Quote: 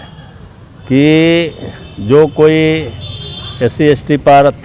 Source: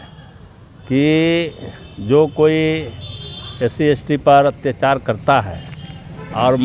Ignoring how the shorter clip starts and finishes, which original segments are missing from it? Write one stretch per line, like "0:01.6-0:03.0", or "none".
none